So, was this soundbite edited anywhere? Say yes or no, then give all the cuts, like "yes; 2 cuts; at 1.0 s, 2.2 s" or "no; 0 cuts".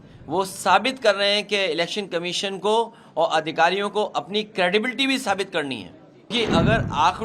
yes; 1 cut; at 6.3 s